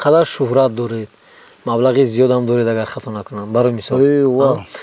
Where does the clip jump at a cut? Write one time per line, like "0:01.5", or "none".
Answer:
none